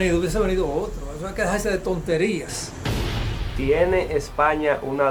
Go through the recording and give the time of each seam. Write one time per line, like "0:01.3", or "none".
none